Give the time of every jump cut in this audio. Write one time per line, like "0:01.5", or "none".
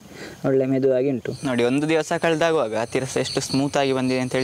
0:01.3